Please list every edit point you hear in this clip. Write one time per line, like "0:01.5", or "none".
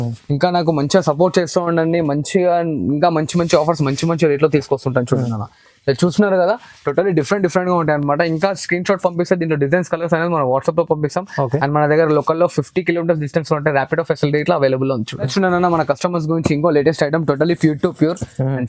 none